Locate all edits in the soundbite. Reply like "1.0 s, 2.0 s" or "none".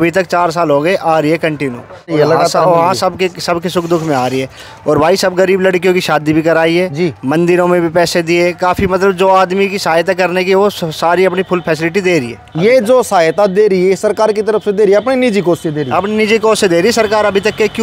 none